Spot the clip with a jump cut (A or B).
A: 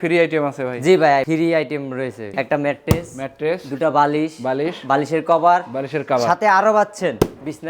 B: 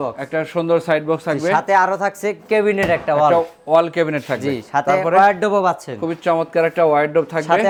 A